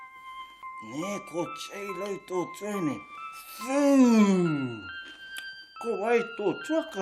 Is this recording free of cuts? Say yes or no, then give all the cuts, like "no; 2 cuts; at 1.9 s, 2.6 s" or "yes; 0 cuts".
yes; 0 cuts